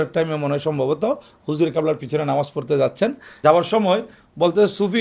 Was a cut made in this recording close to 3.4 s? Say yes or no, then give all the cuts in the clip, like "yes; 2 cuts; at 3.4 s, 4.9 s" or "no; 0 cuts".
yes; 1 cut; at 3.4 s